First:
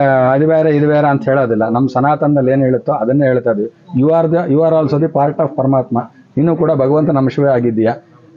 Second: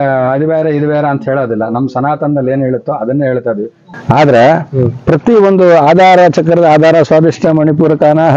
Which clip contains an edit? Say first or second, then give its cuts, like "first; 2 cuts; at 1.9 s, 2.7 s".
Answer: second; 1 cut; at 3.8 s